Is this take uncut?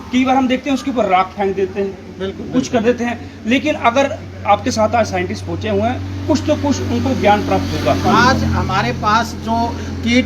no; 1 cut; at 8.1 s

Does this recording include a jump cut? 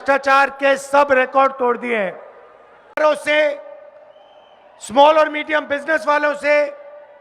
yes; 1 cut; at 3.0 s

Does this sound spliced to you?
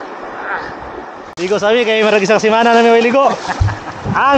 yes; 1 cut; at 1.2 s

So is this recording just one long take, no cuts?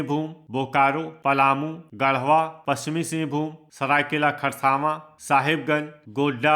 no; 4 cuts; at 1.3 s, 2.6 s, 3.6 s, 5.1 s

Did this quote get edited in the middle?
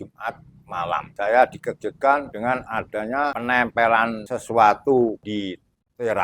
yes; 5 cuts; at 1.1 s, 2.3 s, 3.3 s, 4.3 s, 5.2 s

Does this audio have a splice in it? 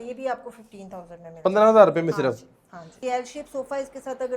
yes; 1 cut; at 2.9 s

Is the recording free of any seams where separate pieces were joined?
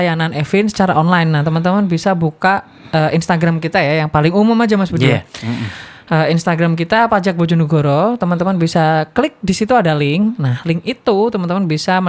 yes; 0 cuts

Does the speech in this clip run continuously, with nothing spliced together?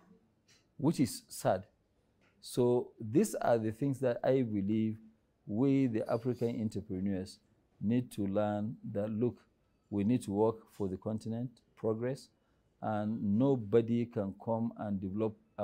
yes; 0 cuts

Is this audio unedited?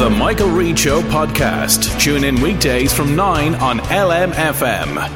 yes; 0 cuts

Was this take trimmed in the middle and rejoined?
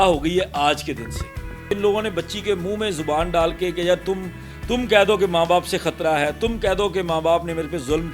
yes; 1 cut; at 1.7 s

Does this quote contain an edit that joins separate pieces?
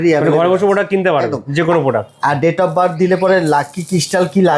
no; 0 cuts

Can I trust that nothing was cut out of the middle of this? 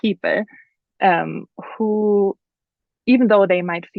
yes; 0 cuts

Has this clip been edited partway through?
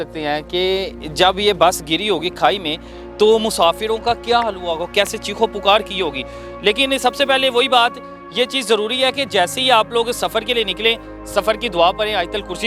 no; 0 cuts

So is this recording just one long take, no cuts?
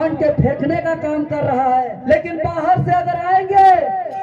no; 1 cut; at 1.9 s

